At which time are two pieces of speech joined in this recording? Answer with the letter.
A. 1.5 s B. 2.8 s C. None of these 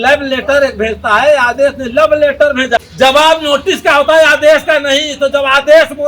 B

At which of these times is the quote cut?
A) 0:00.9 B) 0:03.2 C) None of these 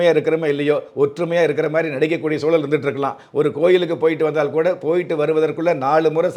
C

